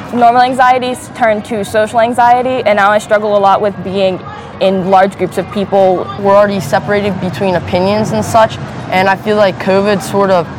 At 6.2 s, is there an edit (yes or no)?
yes